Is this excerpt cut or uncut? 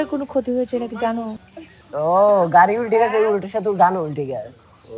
cut